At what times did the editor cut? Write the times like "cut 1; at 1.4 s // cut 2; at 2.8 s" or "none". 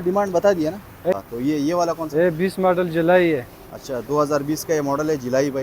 cut 1; at 1.1 s